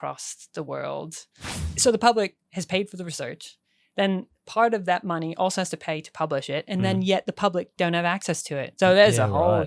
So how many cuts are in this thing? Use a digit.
1